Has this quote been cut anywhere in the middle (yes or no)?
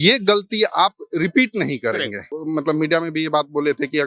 yes